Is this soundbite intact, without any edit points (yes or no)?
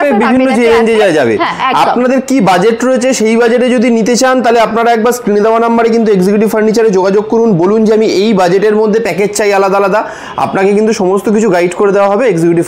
yes